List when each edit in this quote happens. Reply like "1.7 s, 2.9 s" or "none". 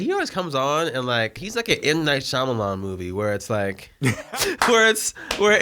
1.4 s, 4.3 s